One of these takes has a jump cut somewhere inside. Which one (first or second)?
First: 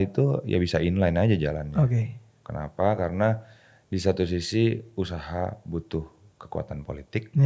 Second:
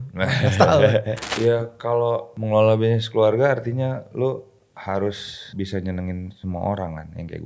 second